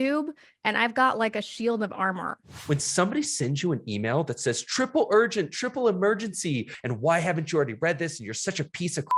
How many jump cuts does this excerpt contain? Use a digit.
1